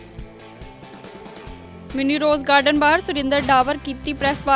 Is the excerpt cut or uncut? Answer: uncut